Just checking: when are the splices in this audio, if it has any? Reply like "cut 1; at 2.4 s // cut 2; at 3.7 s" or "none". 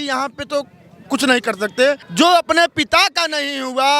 cut 1; at 2.1 s